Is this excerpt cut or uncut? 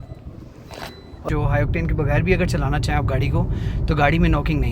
cut